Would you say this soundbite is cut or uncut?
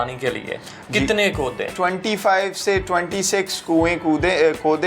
cut